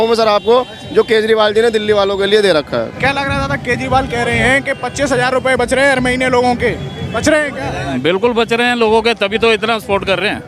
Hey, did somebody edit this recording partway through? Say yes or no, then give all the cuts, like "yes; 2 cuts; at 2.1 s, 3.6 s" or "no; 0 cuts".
yes; 1 cut; at 2.9 s